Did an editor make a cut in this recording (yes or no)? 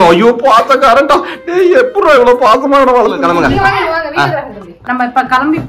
yes